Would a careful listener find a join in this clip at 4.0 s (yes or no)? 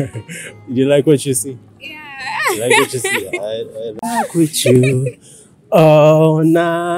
yes